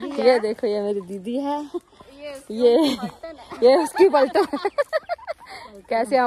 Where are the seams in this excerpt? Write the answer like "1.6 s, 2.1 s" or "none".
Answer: none

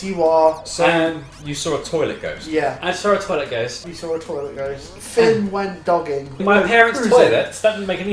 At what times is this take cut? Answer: 3.8 s, 5.0 s, 6.4 s

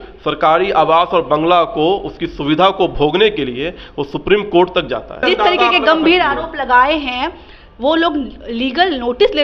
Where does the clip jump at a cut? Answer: 5.2 s

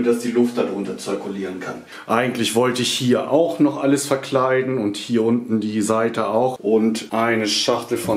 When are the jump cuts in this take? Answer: 1.9 s, 6.8 s

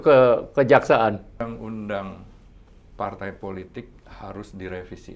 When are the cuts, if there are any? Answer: 1.4 s

